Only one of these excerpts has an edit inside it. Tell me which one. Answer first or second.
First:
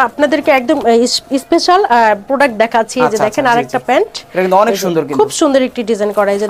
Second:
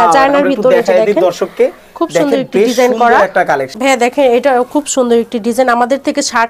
second